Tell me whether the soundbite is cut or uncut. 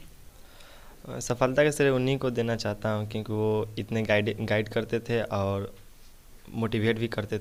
uncut